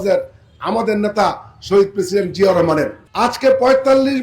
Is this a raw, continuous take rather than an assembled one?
no; 1 cut; at 3.1 s

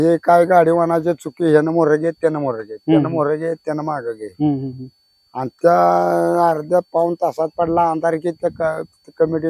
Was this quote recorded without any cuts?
yes; 0 cuts

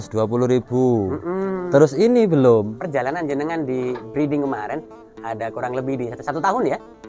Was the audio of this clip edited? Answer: yes; 1 cut; at 2.8 s

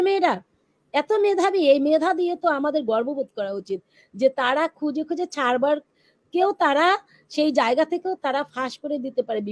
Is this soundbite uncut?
yes; 0 cuts

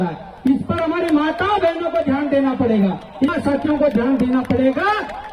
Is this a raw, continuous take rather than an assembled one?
no; 1 cut; at 3.3 s

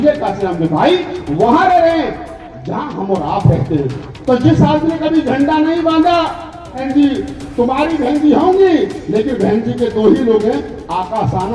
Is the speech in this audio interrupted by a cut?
yes; 1 cut; at 6.8 s

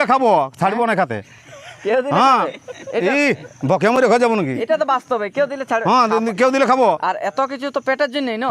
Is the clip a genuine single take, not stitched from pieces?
yes; 0 cuts

